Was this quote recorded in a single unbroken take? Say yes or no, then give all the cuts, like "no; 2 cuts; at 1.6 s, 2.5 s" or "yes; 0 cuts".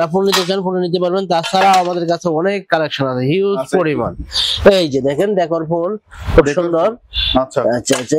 yes; 0 cuts